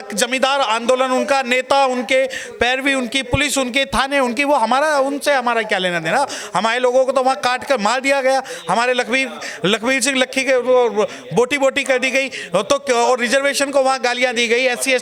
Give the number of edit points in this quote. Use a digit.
0